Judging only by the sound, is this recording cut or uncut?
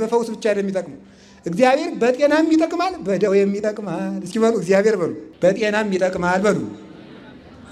cut